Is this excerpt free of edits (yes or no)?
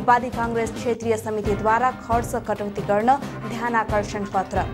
yes